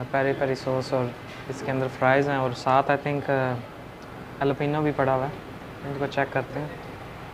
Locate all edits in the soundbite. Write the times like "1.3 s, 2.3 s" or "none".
4.3 s